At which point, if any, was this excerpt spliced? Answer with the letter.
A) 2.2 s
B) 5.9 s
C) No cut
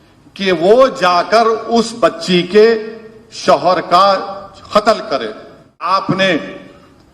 B